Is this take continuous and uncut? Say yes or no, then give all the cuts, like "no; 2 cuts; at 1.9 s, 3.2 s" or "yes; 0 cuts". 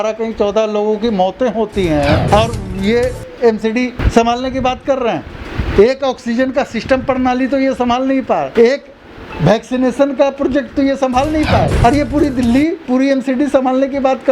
no; 4 cuts; at 2.2 s, 4.0 s, 8.5 s, 11.7 s